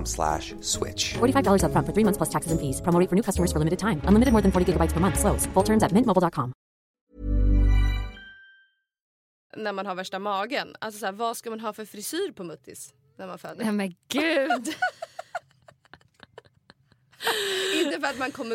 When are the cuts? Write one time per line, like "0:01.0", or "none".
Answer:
0:09.5
0:17.1